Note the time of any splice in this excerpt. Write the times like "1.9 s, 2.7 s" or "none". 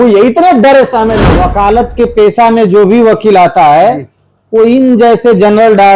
1.3 s